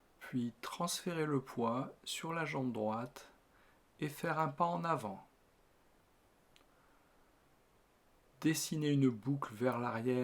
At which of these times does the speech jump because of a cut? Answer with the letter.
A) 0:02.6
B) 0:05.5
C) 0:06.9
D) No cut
C